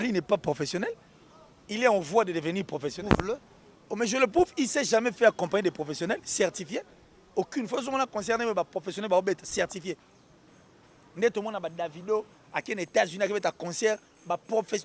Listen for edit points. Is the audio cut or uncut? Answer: uncut